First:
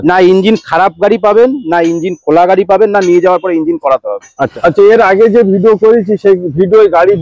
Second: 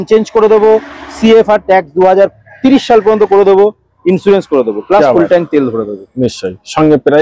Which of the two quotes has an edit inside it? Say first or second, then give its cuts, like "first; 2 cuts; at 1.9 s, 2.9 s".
first; 1 cut; at 4.5 s